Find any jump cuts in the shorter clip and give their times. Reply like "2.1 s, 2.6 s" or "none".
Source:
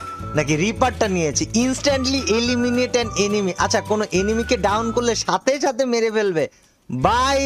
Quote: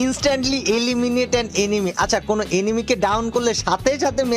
none